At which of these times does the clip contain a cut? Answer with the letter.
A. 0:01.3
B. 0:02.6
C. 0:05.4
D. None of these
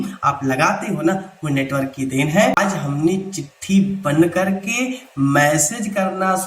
B